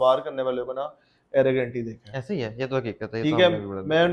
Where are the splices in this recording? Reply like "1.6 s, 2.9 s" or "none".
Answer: none